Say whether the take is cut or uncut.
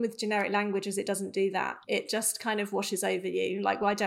cut